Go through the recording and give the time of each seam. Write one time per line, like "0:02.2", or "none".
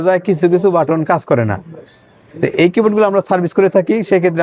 none